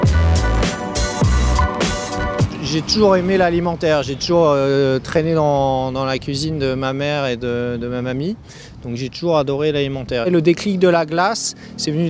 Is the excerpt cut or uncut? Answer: cut